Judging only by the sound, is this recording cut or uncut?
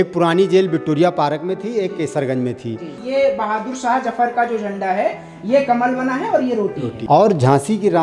cut